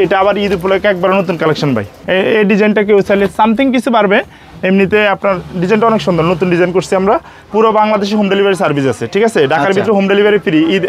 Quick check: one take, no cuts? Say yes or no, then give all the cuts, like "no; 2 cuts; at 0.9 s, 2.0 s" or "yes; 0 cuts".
no; 2 cuts; at 2.0 s, 7.3 s